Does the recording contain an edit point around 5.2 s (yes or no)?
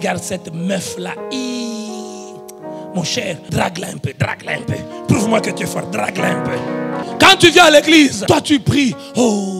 no